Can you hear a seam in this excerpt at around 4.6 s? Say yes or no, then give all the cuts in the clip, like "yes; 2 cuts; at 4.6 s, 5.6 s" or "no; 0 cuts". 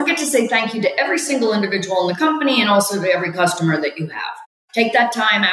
yes; 1 cut; at 4.6 s